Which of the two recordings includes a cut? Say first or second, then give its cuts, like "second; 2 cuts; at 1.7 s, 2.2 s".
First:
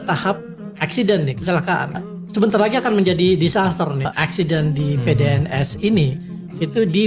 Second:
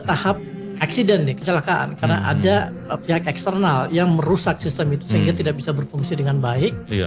first; 2 cuts; at 2.0 s, 4.1 s